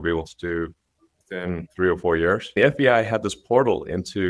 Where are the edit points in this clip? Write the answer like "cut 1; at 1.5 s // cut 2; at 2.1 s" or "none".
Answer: cut 1; at 1.7 s // cut 2; at 2.5 s